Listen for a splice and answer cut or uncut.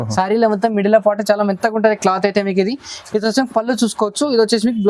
uncut